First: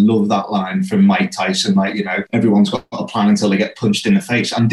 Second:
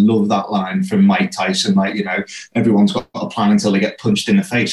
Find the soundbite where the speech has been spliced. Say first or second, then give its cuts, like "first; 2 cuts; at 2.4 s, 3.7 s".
first; 1 cut; at 2.2 s